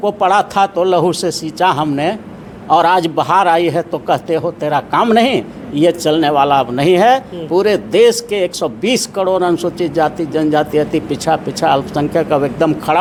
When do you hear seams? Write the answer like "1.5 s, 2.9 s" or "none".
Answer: none